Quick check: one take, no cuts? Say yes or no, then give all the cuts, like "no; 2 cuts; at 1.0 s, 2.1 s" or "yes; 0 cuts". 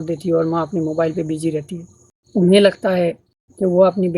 no; 1 cut; at 2.1 s